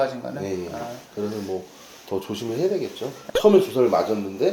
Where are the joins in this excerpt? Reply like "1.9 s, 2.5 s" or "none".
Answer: 3.1 s

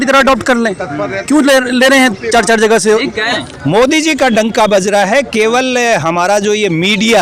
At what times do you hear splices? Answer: 3.3 s

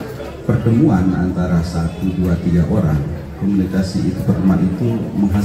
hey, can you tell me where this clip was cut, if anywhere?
none

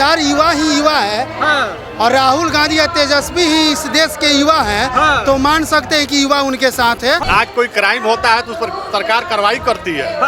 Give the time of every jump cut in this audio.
7.2 s

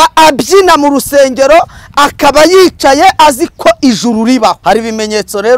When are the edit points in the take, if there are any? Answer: 4.6 s

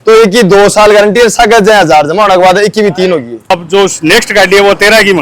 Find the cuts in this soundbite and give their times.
3.5 s

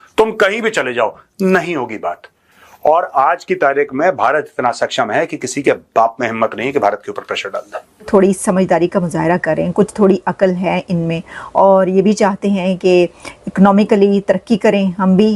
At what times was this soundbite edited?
8.1 s

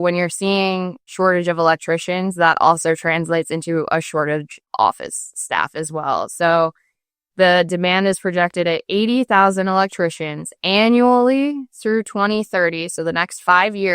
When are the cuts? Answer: 1.1 s, 4.6 s

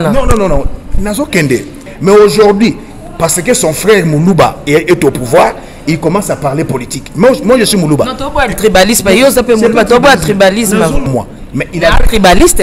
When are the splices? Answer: 1.9 s, 11.1 s

